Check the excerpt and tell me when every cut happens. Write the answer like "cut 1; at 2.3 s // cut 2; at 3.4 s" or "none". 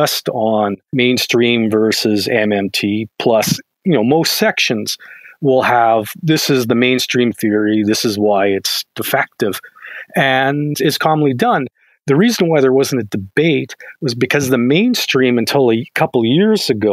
none

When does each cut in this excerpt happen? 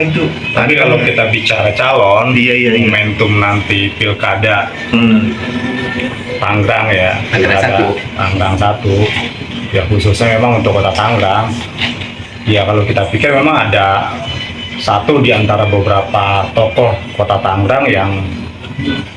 none

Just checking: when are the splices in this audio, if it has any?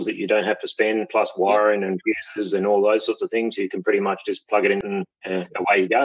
cut 1; at 4.8 s

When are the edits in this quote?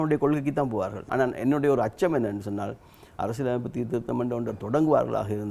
cut 1; at 1.0 s

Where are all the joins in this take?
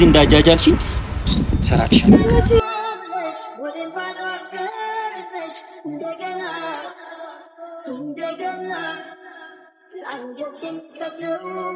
cut 1; at 2.6 s

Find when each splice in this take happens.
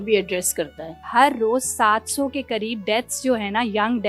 cut 1; at 1.0 s

